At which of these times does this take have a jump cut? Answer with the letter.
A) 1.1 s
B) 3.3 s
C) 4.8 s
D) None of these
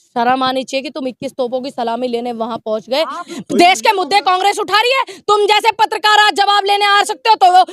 B